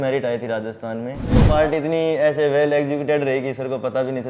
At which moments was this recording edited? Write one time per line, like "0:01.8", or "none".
0:01.5